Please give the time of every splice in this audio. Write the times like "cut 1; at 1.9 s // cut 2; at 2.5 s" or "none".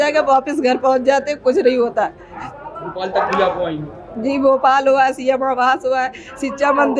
none